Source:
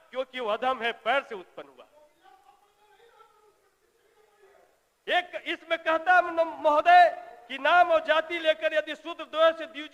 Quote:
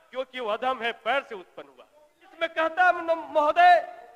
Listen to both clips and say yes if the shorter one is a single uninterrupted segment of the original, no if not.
no